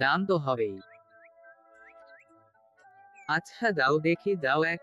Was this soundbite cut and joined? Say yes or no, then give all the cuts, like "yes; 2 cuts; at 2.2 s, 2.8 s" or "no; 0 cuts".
no; 0 cuts